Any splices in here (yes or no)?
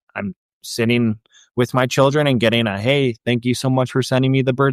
no